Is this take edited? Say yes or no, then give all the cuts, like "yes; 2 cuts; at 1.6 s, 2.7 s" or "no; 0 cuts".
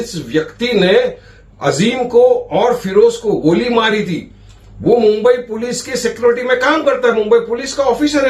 no; 0 cuts